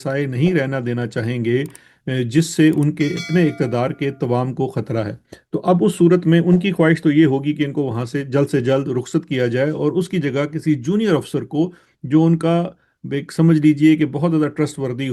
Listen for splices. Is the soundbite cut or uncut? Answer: uncut